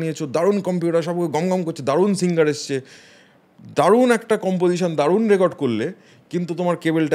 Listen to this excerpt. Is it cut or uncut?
uncut